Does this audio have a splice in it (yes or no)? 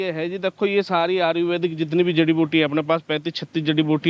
no